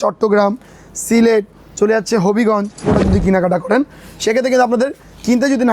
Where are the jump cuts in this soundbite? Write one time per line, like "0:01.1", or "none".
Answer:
0:02.8